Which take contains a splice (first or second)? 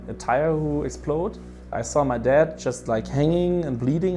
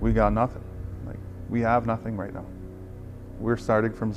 first